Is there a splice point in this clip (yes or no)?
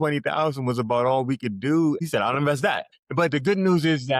yes